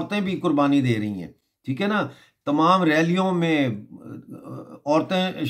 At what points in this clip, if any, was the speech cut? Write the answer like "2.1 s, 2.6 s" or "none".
none